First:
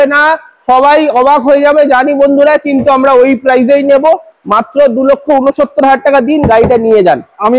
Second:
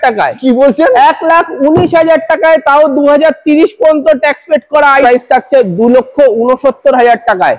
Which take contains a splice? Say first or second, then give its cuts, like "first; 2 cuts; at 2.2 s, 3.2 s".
second; 1 cut; at 5.0 s